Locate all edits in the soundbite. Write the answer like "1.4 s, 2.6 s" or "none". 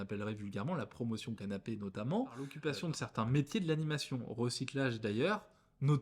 2.8 s